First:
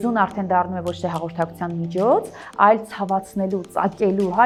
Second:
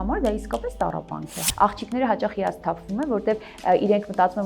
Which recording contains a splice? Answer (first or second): second